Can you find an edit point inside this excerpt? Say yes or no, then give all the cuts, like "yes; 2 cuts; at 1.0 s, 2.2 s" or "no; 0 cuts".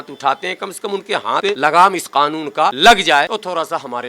yes; 3 cuts; at 1.5 s, 2.8 s, 3.3 s